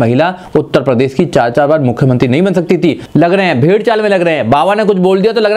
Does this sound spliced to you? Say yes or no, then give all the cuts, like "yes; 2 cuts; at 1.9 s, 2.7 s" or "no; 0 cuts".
yes; 1 cut; at 3.0 s